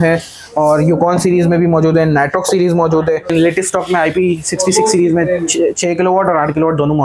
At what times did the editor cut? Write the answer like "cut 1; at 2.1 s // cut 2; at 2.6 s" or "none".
cut 1; at 3.3 s